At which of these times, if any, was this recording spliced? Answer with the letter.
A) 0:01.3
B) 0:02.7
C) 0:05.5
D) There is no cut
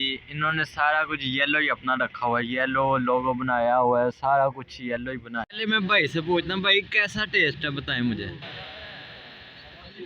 C